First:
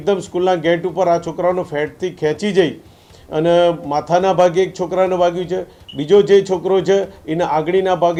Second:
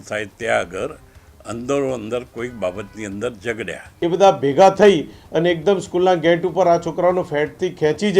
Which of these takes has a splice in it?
second; 1 cut; at 3.8 s

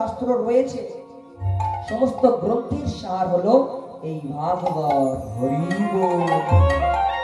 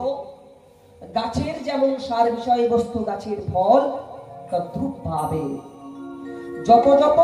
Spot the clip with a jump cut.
first; 1 cut; at 1.5 s

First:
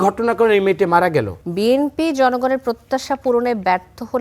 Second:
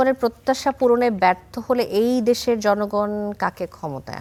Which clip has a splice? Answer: first; 1 cut; at 1.4 s

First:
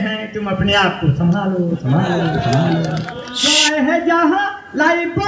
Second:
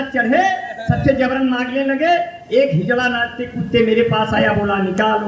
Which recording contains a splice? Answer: first; 1 cut; at 3.5 s

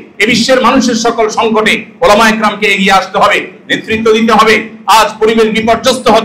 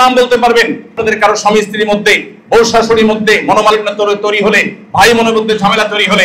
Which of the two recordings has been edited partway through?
second; 1 cut; at 1.0 s

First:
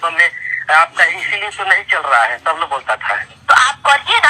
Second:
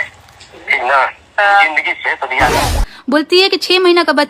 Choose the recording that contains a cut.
second; 1 cut; at 2.8 s

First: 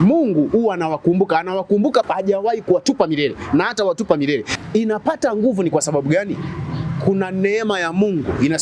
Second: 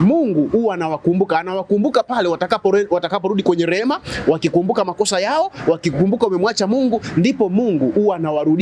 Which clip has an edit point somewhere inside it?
first; 2 cuts; at 2.1 s, 4.5 s

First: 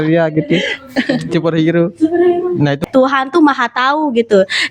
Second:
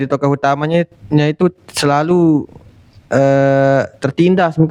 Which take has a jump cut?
first; 1 cut; at 2.8 s

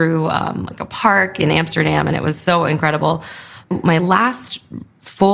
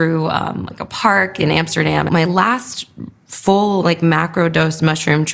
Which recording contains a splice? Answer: second; 1 cut; at 2.1 s

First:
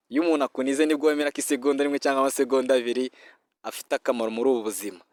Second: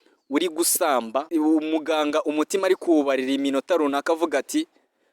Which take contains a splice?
second; 1 cut; at 1.3 s

